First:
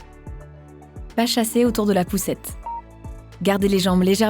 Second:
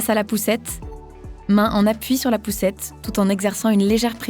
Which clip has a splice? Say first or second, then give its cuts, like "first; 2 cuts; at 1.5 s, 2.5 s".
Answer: first; 1 cut; at 1.1 s